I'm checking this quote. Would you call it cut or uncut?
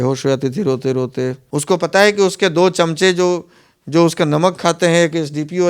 cut